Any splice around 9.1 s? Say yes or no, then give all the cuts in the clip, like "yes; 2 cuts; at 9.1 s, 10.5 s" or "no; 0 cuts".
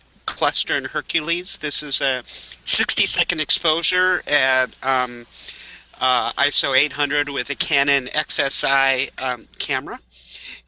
no; 1 cut; at 3.6 s